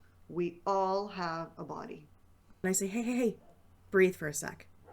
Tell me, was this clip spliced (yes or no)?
yes